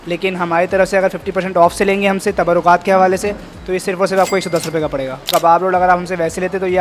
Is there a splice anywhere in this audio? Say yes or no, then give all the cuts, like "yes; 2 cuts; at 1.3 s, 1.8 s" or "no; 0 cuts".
yes; 1 cut; at 5.3 s